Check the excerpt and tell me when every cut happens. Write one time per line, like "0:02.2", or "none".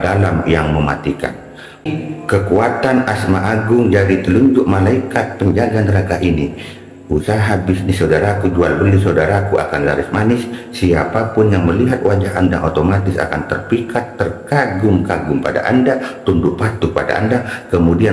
0:01.9